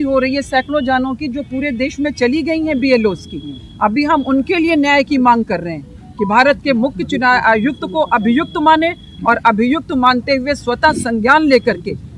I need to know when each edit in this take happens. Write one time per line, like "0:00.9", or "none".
none